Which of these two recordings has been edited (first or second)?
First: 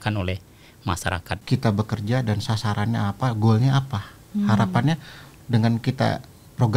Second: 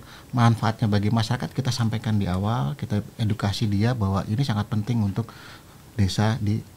first